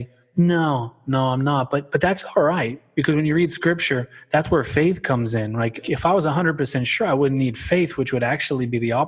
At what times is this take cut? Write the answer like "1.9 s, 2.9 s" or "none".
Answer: 2.8 s, 5.8 s